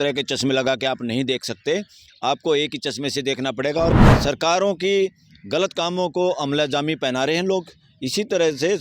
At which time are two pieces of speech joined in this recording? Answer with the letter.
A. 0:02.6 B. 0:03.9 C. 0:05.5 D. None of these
B